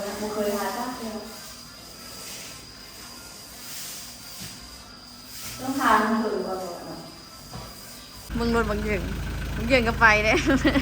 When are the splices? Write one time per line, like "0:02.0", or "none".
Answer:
0:08.2